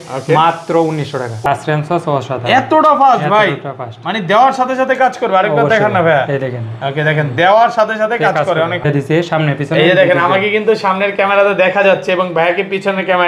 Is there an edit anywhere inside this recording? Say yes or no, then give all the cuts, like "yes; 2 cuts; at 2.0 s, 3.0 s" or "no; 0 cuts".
yes; 2 cuts; at 1.4 s, 8.9 s